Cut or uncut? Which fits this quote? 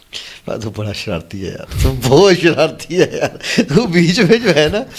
uncut